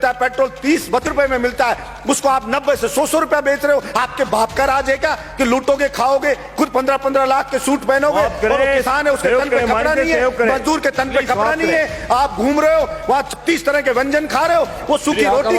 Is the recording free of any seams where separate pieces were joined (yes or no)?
no